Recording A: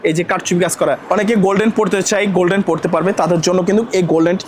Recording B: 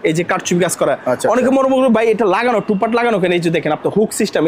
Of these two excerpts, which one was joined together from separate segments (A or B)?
A